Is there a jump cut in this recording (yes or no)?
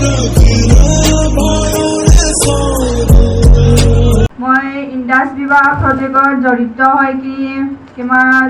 yes